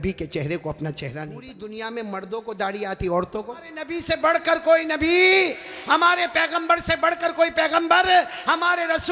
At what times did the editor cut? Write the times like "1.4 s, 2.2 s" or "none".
1.5 s, 3.9 s